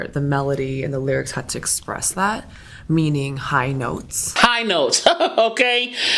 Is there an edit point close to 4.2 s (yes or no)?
yes